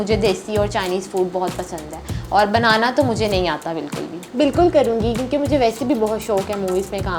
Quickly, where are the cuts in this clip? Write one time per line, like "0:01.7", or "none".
0:04.2